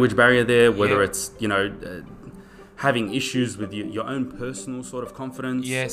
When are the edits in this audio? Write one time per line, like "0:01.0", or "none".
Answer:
none

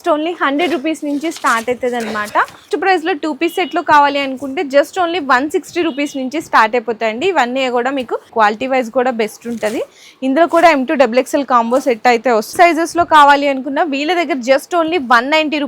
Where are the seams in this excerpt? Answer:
0:02.7
0:08.3
0:12.5

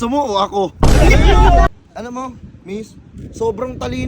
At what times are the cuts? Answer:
0:01.7

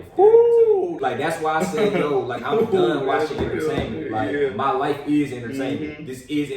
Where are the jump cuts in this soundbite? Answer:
0:01.0

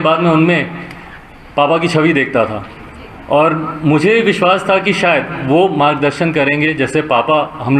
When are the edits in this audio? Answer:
none

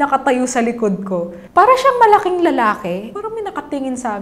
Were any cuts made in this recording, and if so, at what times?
0:01.4
0:03.1

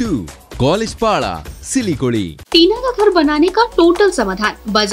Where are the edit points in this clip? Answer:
0:02.4

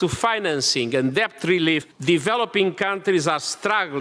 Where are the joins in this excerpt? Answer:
0:01.9

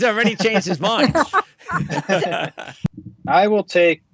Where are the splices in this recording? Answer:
0:03.1

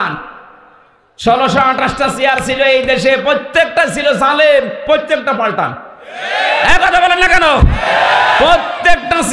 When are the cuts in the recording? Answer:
none

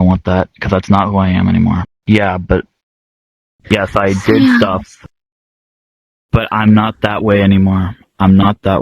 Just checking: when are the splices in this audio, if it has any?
0:01.9

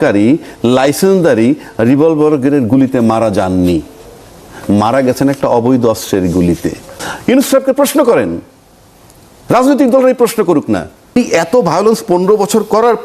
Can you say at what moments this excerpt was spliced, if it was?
0:07.1
0:11.2

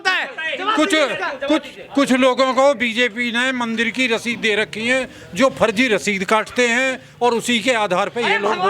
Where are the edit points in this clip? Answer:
none

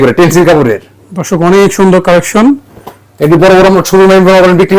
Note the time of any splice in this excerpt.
none

